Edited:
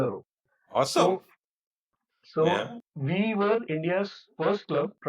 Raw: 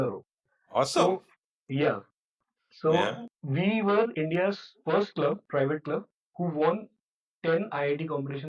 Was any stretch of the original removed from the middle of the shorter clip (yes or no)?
yes